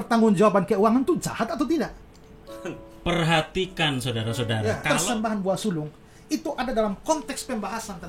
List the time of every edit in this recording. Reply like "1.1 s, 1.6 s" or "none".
4.8 s